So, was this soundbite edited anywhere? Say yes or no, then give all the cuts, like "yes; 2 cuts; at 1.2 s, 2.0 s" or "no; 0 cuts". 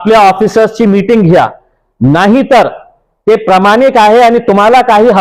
no; 0 cuts